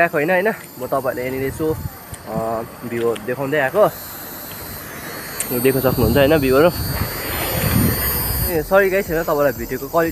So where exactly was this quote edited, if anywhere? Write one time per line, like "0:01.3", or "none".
none